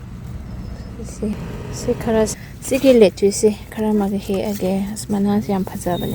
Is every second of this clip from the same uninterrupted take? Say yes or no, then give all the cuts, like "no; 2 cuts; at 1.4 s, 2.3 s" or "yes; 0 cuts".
no; 1 cut; at 2.4 s